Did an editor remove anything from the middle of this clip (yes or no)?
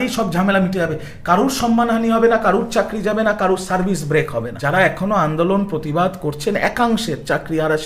yes